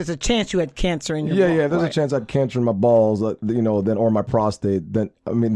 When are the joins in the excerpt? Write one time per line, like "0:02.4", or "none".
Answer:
none